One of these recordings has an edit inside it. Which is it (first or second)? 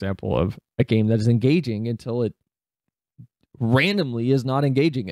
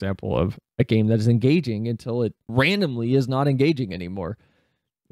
second